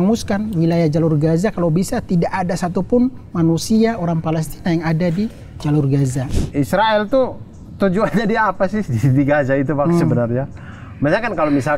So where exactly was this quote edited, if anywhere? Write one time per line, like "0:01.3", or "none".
0:06.2